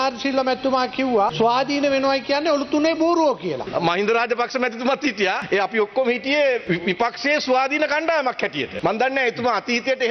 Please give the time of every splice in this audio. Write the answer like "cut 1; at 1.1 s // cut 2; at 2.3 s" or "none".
cut 1; at 1.3 s // cut 2; at 3.6 s // cut 3; at 5.4 s // cut 4; at 6.6 s // cut 5; at 8.7 s